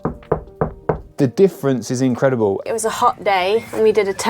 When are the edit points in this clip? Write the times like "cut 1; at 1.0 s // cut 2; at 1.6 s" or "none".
cut 1; at 1.1 s // cut 2; at 2.7 s

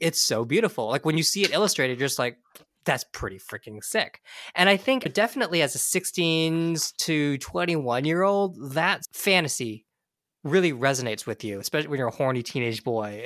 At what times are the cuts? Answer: none

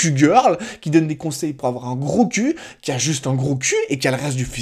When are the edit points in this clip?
none

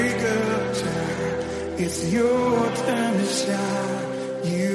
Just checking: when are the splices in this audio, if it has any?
none

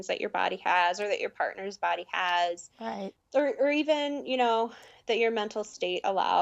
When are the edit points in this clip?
cut 1; at 3.1 s

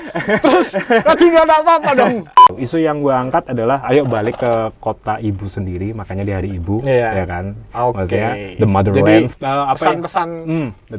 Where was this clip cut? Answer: cut 1; at 2.5 s // cut 2; at 9.3 s

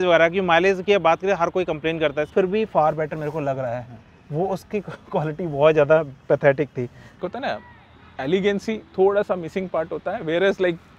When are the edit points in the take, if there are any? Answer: cut 1; at 2.3 s // cut 2; at 7.0 s

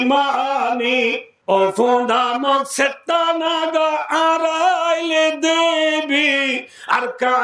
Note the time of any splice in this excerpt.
cut 1; at 1.3 s

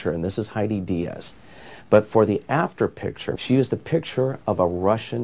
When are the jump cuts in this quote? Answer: cut 1; at 3.3 s

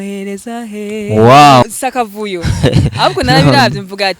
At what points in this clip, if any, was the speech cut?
cut 1; at 1.6 s

